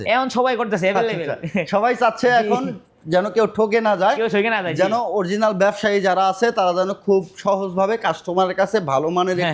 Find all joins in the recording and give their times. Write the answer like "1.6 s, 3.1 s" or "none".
none